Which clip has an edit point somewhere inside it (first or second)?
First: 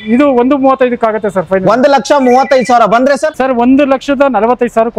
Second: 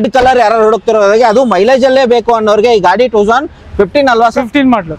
first